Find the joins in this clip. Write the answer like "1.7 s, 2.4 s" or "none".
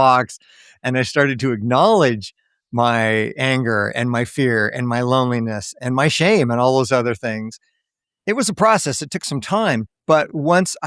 9.9 s